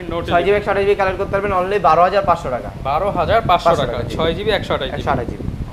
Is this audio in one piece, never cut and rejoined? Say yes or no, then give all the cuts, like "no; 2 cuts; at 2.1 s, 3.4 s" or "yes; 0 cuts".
yes; 0 cuts